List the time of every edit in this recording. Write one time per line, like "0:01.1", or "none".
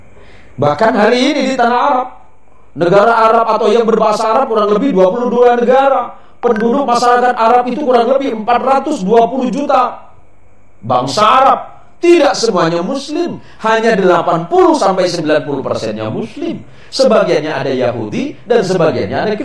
none